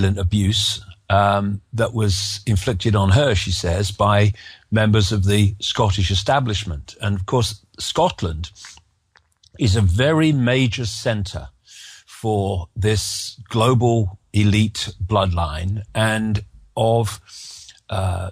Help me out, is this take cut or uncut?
cut